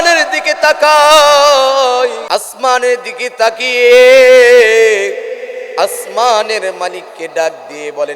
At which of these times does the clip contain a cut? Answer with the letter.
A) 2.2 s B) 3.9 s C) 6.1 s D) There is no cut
A